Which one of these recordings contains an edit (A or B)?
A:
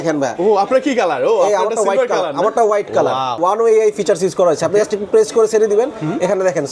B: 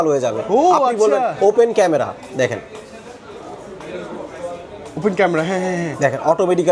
A